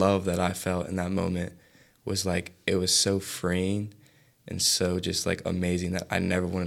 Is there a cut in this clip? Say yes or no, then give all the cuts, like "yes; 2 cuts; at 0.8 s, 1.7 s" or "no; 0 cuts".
no; 0 cuts